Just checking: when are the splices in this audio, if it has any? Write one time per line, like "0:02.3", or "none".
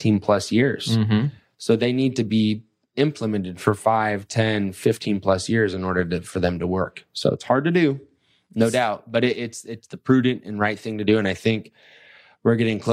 none